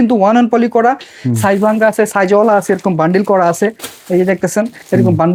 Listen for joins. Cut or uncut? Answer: uncut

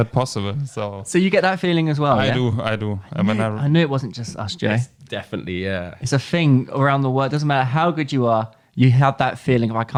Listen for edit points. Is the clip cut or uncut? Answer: uncut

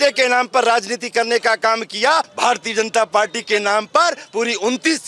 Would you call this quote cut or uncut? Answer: cut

